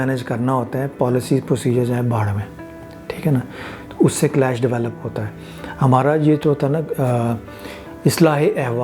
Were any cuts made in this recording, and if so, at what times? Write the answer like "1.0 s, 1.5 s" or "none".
none